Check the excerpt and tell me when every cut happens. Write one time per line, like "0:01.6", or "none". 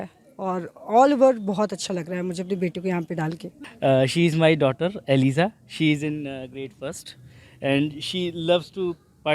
0:03.5